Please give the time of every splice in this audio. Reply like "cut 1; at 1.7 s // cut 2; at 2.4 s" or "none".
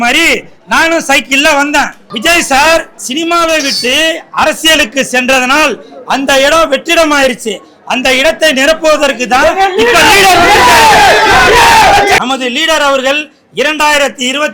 cut 1; at 2.0 s // cut 2; at 3.0 s // cut 3; at 12.2 s